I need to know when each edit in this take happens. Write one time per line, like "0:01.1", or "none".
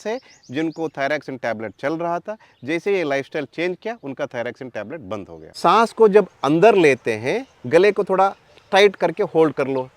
0:05.4

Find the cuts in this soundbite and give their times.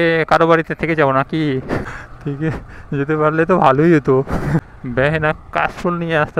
0:01.8
0:04.6

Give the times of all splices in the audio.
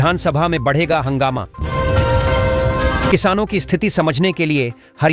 0:01.6
0:03.1

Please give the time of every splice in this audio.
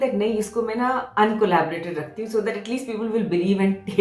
none

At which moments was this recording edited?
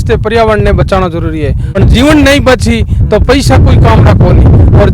0:01.7

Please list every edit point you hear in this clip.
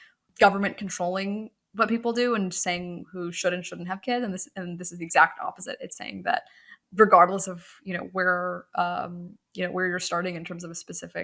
none

